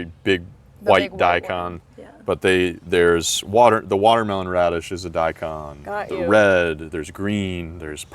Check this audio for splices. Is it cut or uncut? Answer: uncut